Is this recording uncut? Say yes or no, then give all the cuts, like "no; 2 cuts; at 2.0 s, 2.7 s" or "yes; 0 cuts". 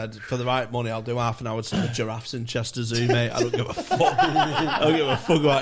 yes; 0 cuts